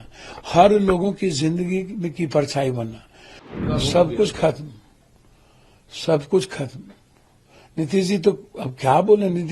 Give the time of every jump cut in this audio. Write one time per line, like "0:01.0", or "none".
0:03.5